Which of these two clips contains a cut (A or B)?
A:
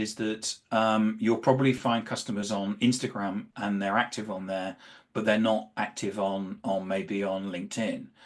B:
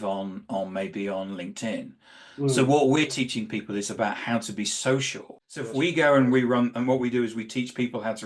B